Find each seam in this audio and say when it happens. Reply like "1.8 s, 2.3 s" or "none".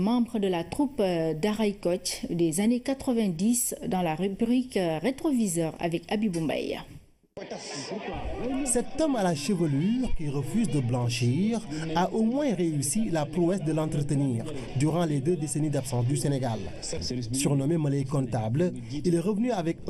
17.3 s